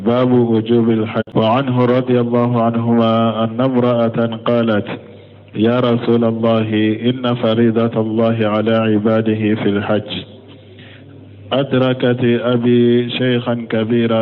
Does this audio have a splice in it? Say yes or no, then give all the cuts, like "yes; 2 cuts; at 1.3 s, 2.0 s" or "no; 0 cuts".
yes; 1 cut; at 1.2 s